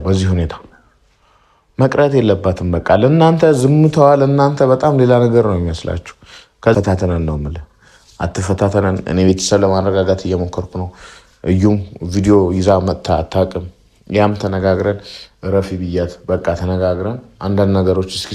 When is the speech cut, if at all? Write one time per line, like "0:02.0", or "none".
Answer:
0:06.7